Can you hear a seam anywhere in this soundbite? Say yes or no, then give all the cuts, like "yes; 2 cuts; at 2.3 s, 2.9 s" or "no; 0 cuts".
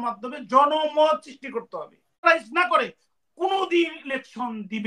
yes; 1 cut; at 2.2 s